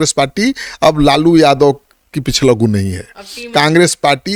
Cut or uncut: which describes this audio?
uncut